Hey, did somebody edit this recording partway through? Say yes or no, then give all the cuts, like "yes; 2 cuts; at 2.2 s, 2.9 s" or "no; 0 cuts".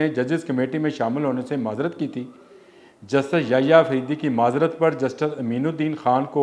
no; 0 cuts